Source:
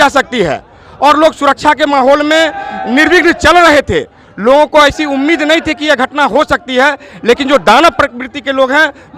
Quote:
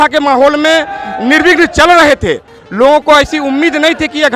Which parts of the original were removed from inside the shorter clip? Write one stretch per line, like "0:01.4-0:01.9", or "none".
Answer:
none